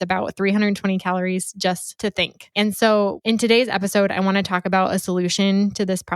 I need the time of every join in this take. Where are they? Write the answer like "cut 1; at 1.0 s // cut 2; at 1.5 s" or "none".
cut 1; at 2.1 s // cut 2; at 3.2 s